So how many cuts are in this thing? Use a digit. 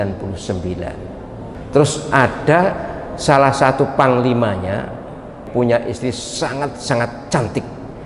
2